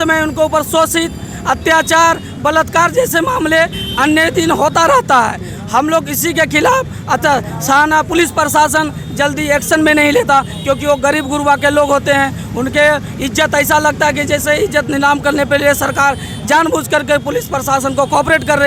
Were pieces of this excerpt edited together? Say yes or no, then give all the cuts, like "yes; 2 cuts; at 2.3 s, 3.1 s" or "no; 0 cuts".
no; 0 cuts